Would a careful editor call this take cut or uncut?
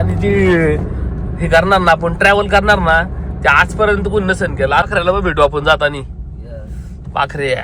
cut